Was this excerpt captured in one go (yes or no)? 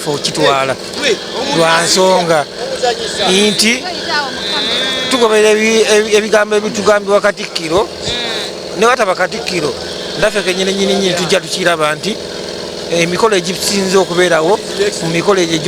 yes